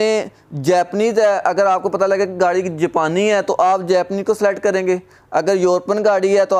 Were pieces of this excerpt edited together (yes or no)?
no